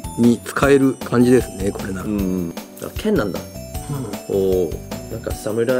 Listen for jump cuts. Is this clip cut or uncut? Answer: cut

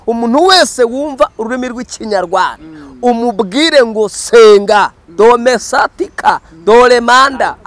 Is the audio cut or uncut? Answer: uncut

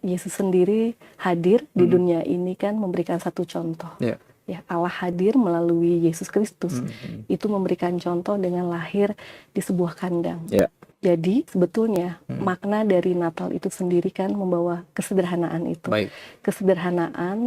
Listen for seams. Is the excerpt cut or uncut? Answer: cut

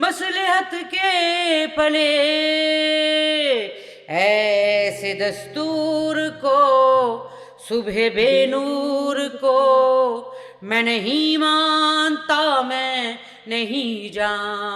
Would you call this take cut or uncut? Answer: uncut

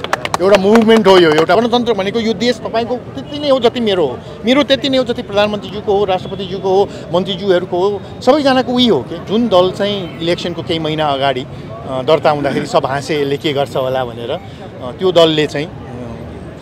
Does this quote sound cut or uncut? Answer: cut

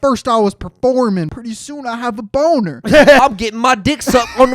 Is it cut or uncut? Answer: cut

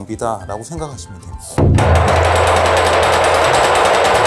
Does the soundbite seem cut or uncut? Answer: cut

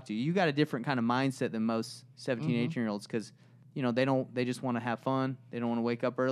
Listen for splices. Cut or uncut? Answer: uncut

